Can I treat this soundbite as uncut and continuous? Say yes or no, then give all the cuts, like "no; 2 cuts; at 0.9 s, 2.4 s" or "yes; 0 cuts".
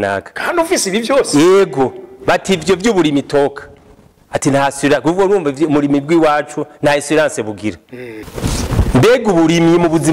no; 1 cut; at 8.3 s